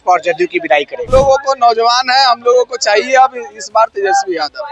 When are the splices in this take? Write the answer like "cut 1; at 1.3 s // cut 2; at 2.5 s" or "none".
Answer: cut 1; at 1.0 s